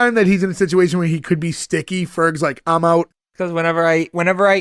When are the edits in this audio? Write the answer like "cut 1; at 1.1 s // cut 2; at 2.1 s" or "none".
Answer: cut 1; at 3.2 s